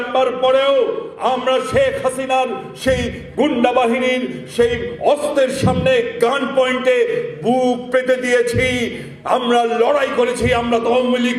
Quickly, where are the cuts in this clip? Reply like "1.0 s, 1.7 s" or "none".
none